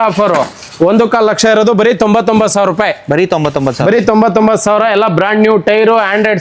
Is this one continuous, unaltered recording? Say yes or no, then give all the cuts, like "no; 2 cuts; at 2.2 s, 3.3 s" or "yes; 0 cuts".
yes; 0 cuts